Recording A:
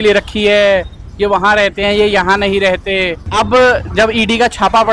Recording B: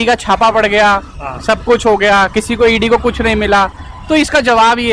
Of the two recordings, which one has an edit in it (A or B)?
A